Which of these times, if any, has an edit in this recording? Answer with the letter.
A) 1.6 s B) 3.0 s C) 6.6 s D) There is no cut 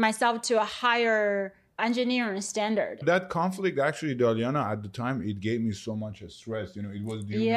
B